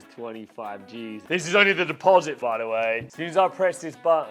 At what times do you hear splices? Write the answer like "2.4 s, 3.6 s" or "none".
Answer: 3.1 s